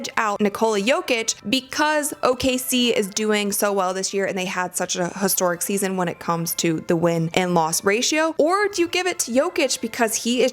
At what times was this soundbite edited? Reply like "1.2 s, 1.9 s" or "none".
1.3 s, 7.3 s